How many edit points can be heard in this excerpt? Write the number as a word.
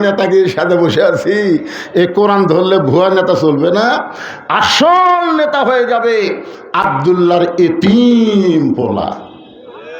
zero